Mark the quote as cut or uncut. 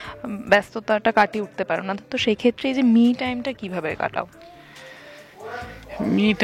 uncut